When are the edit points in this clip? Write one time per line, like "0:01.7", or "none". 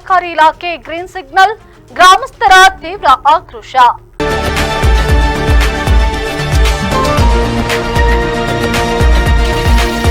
0:04.1